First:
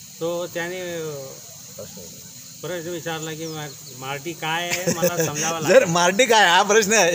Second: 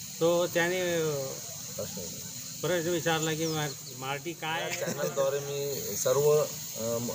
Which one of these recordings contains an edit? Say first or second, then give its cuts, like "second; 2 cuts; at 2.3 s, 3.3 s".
second; 1 cut; at 4.8 s